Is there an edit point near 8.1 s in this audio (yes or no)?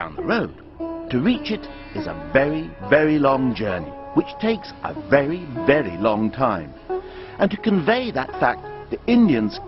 yes